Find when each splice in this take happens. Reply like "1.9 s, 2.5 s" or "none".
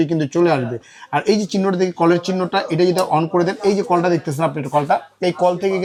none